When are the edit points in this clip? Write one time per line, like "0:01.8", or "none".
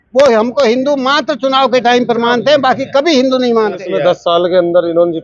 0:03.8